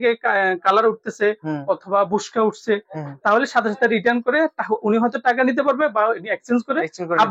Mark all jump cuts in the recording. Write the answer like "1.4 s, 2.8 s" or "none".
none